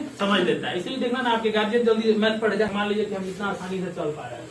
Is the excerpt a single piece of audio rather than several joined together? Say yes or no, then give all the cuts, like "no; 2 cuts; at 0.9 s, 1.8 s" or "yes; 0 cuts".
no; 1 cut; at 2.7 s